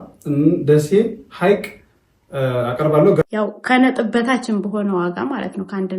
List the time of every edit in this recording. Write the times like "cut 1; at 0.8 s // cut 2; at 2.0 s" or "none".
cut 1; at 3.2 s